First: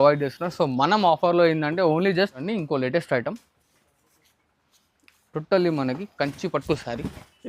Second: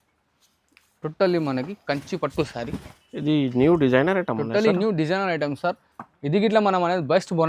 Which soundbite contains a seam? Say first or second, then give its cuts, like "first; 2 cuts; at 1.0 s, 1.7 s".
first; 1 cut; at 2.4 s